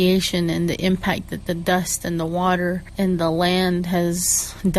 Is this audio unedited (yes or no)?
no